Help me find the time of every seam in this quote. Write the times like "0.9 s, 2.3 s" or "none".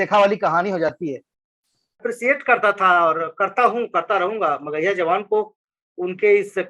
2.0 s